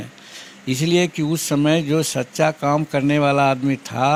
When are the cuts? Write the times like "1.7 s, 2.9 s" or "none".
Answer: none

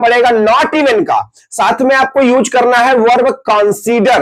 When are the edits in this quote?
none

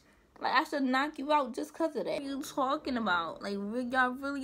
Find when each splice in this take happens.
2.2 s

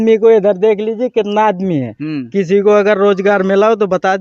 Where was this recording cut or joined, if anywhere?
none

